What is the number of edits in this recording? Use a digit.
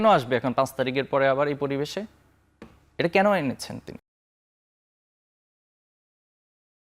0